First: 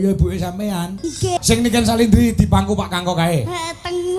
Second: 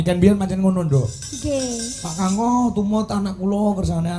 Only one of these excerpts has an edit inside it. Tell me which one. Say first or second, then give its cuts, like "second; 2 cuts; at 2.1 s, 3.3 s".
first; 1 cut; at 1.4 s